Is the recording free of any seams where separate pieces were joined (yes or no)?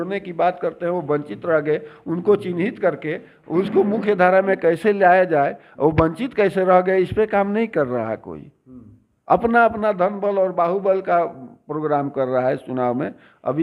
yes